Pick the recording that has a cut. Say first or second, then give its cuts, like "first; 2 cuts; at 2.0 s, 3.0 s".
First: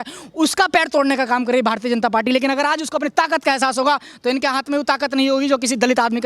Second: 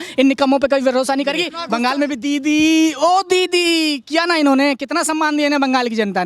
second; 1 cut; at 1.5 s